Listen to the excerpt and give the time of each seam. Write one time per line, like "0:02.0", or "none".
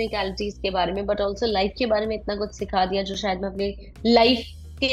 none